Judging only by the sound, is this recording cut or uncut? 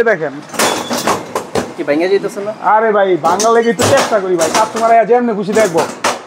uncut